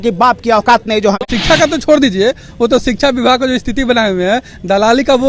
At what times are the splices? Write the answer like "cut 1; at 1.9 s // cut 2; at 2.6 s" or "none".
cut 1; at 1.1 s